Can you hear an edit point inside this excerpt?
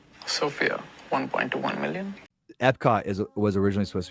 yes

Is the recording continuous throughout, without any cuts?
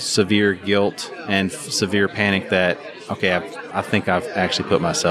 yes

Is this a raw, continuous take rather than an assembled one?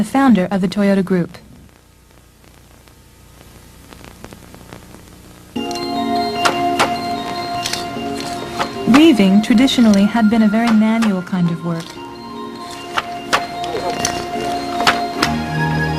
yes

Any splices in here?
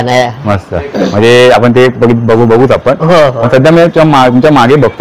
no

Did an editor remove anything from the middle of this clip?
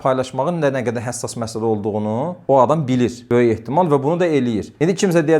no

